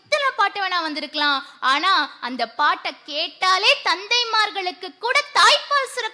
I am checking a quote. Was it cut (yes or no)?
no